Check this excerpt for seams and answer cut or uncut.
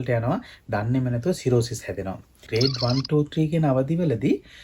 cut